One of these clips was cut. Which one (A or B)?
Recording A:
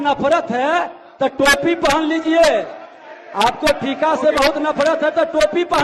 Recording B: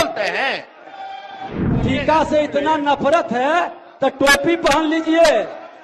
B